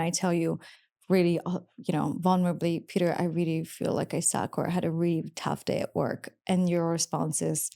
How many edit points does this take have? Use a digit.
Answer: 0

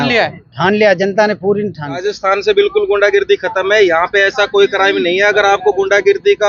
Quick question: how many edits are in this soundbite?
1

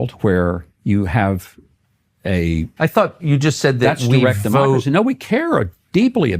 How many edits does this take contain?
1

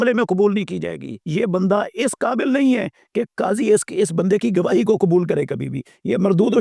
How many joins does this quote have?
1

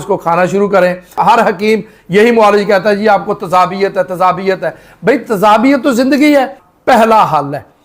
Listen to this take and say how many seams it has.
2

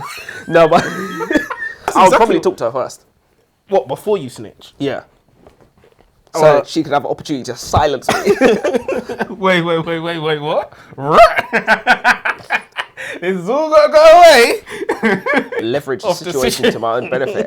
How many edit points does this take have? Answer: 2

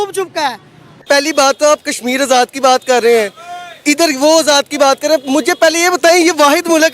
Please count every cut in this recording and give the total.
1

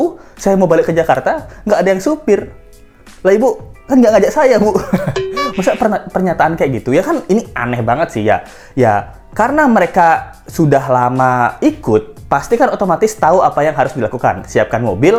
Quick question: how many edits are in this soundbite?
0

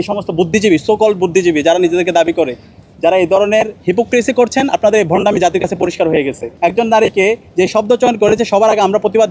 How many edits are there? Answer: 1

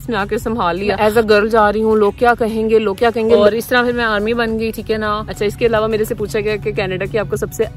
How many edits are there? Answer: 3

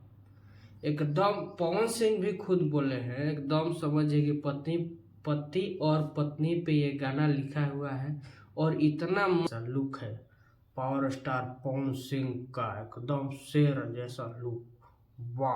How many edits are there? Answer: 1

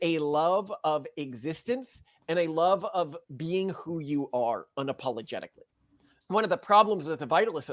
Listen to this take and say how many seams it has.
1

